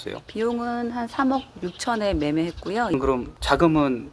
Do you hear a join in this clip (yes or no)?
no